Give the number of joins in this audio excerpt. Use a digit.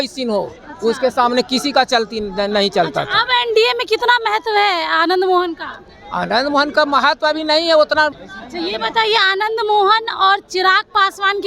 1